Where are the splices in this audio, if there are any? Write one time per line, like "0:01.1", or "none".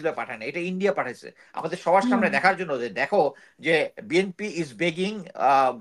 none